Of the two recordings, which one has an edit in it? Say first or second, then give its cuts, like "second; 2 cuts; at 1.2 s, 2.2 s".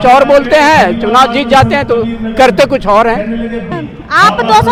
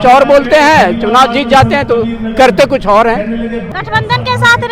second; 1 cut; at 3.7 s